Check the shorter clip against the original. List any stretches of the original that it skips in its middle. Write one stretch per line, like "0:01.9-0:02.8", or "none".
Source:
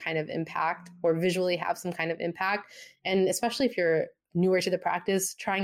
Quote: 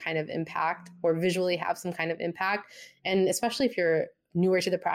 none